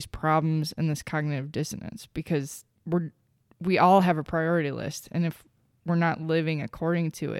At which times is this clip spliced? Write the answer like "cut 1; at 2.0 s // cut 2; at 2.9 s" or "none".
none